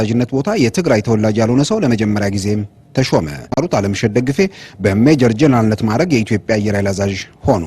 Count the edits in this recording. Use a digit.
1